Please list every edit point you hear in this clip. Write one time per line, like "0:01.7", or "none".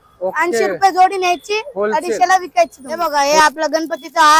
0:02.8